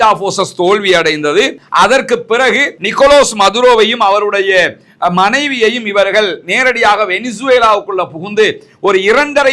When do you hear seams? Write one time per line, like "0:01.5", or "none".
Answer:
0:02.7